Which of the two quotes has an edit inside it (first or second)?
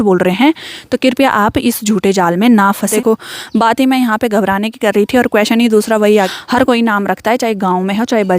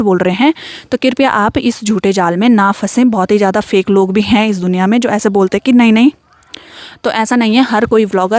first